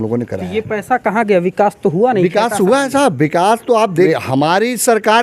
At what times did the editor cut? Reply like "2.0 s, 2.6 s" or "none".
4.1 s